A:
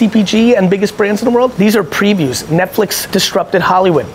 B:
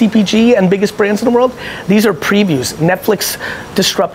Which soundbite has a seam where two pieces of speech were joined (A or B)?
A